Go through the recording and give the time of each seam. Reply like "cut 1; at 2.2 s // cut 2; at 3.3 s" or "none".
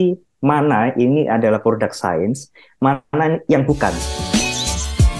cut 1; at 4.1 s

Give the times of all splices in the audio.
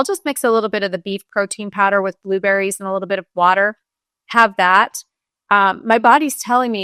none

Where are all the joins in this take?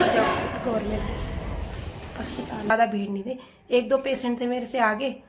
cut 1; at 2.7 s

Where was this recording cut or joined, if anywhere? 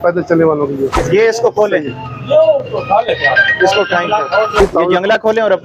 cut 1; at 1.0 s // cut 2; at 4.6 s

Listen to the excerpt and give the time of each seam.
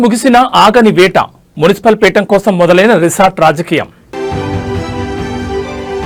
none

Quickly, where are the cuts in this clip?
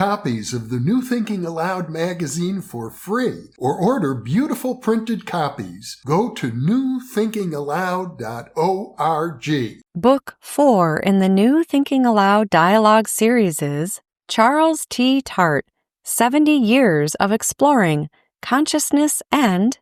none

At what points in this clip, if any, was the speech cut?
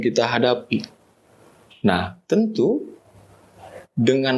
none

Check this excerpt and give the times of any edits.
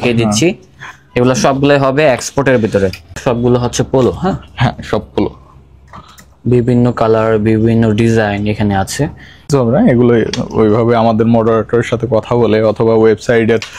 cut 1; at 3.2 s // cut 2; at 9.5 s

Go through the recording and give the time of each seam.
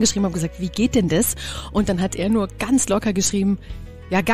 none

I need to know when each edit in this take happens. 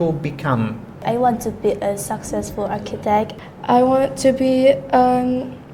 cut 1; at 1.0 s // cut 2; at 3.4 s

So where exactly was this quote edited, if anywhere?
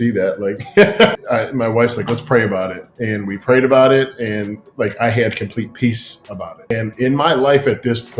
cut 1; at 1.1 s // cut 2; at 6.7 s

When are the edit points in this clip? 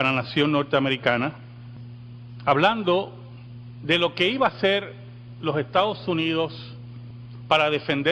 cut 1; at 5.8 s

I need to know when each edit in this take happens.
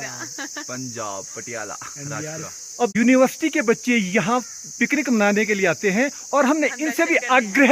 none

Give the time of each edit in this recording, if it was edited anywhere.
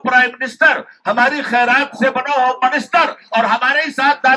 none

